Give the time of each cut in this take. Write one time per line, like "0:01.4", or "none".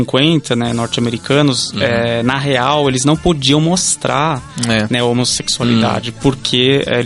none